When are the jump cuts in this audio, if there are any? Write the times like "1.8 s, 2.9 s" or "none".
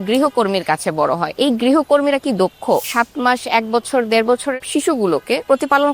1.3 s, 2.9 s, 4.9 s